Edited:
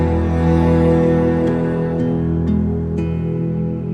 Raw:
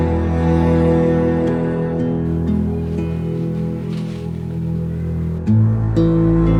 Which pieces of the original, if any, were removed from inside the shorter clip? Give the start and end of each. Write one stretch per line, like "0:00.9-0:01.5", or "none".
none